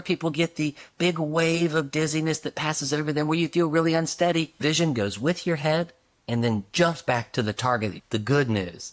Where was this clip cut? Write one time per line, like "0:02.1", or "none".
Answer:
0:04.6
0:07.9